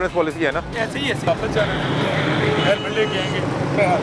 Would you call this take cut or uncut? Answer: cut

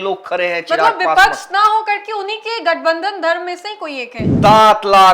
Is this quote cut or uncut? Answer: cut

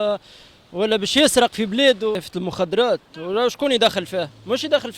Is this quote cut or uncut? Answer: cut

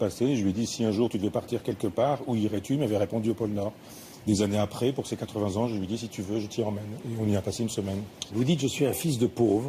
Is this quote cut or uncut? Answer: cut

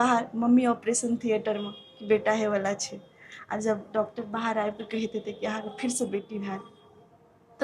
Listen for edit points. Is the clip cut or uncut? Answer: uncut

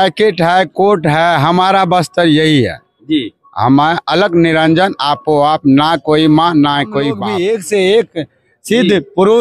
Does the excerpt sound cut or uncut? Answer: cut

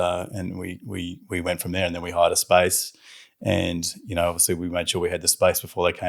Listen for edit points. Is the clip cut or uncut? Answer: uncut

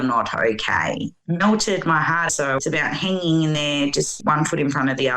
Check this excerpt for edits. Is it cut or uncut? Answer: cut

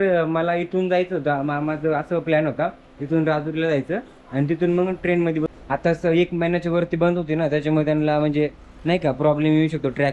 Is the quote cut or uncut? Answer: cut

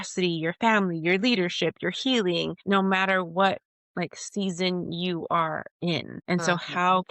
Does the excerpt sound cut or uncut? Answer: cut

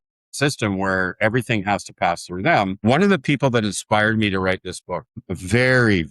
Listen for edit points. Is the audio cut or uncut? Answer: cut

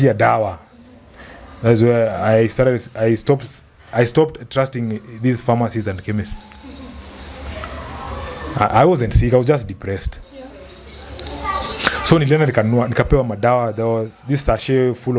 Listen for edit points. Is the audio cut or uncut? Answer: uncut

